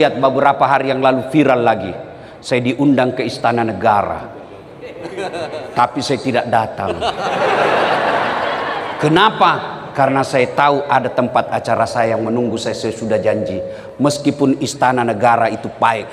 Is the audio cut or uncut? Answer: uncut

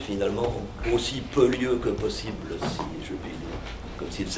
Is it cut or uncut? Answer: uncut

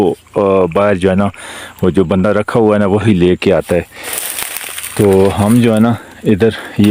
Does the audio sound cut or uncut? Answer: uncut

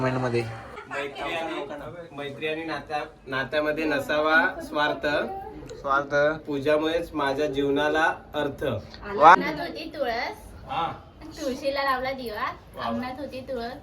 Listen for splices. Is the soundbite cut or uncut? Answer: cut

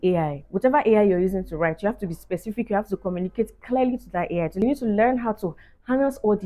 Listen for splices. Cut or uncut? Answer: cut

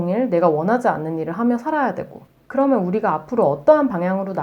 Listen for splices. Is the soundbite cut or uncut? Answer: cut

